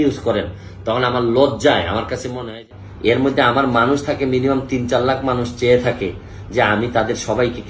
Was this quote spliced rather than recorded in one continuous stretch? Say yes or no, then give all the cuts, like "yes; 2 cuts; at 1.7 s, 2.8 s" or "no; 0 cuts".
yes; 1 cut; at 2.6 s